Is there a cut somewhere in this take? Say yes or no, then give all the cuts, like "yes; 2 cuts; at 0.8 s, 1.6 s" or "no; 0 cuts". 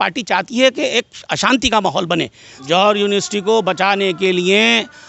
yes; 1 cut; at 2.5 s